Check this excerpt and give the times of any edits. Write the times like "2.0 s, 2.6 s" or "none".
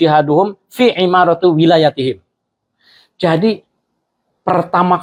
none

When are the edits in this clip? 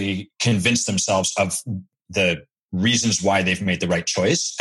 2.0 s

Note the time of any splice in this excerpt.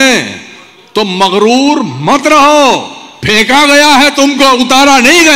none

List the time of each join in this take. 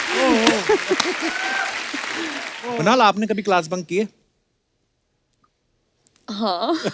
2.5 s

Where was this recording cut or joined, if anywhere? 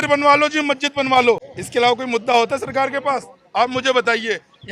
1.6 s

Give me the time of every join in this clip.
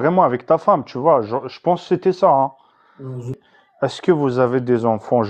3.4 s

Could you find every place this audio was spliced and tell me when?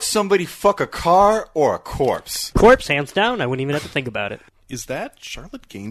2.5 s, 4.4 s

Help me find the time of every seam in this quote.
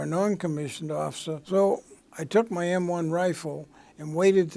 1.3 s

